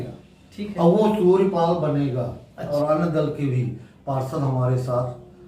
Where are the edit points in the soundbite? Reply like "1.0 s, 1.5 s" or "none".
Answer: 2.7 s